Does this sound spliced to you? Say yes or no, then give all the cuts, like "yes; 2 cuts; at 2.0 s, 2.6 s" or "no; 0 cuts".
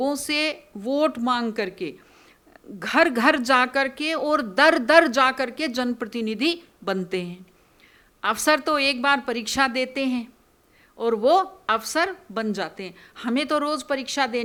no; 0 cuts